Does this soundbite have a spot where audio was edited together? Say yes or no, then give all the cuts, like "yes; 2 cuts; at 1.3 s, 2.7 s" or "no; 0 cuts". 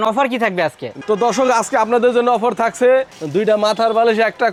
no; 0 cuts